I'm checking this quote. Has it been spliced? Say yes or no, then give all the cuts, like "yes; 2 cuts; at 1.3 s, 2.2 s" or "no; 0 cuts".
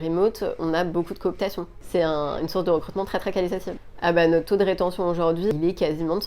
yes; 3 cuts; at 1.7 s, 3.7 s, 5.5 s